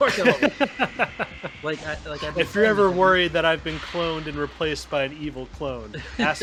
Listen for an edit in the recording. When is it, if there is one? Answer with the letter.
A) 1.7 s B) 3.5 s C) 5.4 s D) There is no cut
D